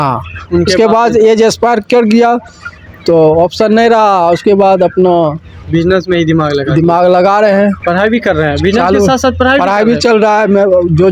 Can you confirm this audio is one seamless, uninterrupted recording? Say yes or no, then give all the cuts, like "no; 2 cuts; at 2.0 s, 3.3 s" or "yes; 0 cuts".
no; 1 cut; at 7.8 s